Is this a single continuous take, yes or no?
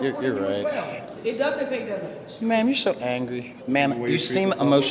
no